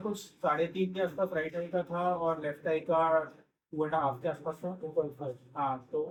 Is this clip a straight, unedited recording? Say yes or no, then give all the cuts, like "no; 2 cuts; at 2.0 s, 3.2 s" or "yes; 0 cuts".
yes; 0 cuts